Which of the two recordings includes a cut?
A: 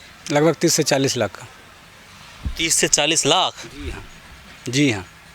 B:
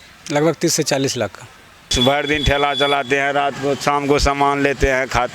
B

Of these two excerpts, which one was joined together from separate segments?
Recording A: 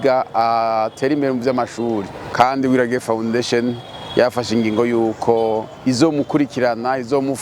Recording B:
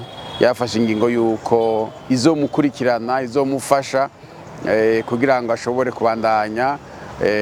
A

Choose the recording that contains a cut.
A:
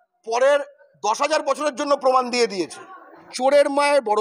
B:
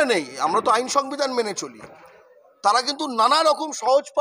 A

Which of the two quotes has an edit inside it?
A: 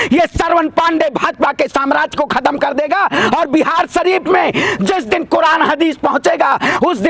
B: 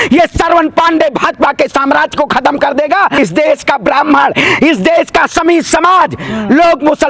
B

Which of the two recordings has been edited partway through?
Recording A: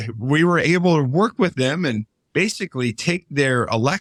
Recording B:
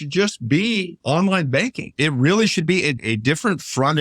B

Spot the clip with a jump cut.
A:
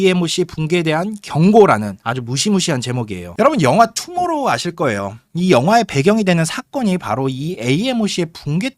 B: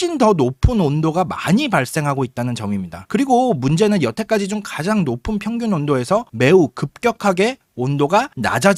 A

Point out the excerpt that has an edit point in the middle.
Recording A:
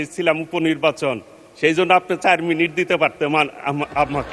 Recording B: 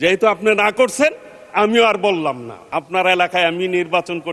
B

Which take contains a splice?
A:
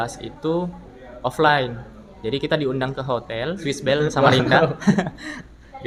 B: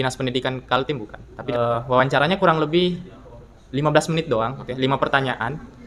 B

